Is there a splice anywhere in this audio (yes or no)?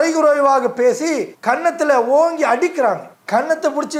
no